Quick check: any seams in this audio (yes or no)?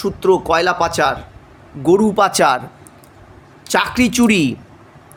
no